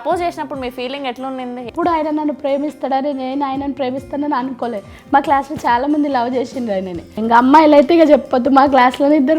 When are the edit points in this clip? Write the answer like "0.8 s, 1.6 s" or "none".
1.7 s, 7.2 s